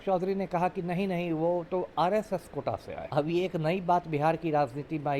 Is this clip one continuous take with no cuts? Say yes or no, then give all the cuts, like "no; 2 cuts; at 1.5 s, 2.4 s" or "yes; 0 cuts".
no; 1 cut; at 3.0 s